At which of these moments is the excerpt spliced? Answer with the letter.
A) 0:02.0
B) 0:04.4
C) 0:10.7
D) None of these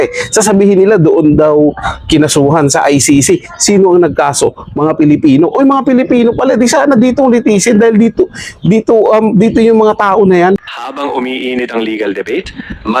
C